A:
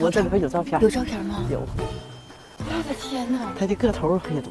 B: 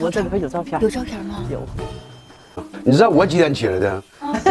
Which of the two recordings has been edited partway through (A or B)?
B